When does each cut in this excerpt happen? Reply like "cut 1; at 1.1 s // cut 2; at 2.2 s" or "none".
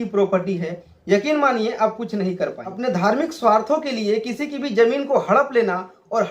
cut 1; at 2.8 s